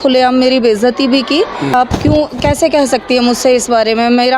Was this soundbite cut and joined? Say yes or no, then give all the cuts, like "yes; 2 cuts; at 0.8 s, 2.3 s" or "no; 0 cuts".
yes; 1 cut; at 1.7 s